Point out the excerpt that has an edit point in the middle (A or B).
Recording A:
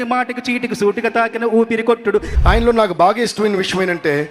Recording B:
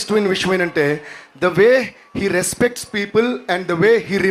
A